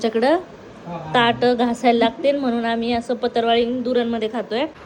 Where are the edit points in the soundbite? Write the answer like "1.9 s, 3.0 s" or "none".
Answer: none